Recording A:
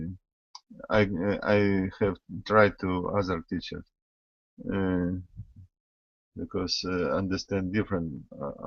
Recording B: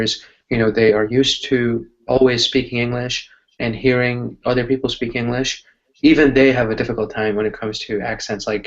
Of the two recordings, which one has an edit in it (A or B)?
B